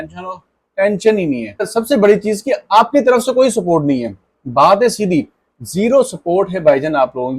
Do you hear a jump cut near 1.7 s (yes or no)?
yes